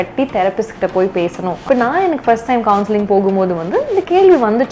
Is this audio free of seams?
no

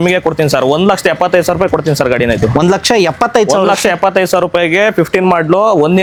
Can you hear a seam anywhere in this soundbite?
no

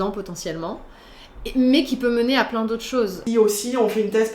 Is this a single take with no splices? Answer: no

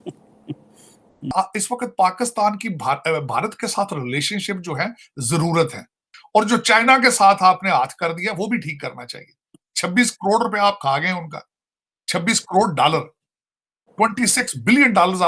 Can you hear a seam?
yes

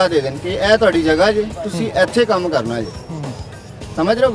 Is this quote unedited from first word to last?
yes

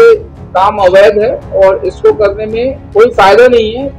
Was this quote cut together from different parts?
yes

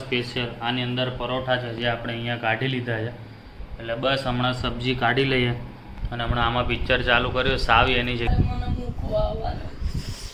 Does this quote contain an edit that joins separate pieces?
yes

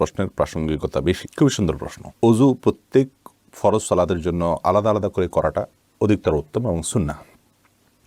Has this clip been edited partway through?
no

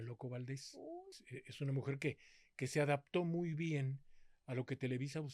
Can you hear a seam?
yes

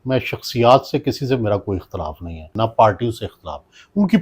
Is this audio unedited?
no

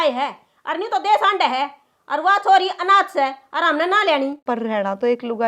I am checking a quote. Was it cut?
yes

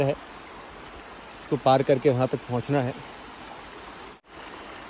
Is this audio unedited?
yes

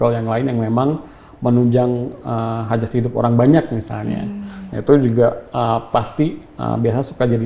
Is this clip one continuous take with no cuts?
yes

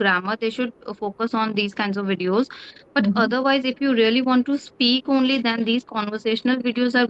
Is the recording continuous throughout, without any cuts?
yes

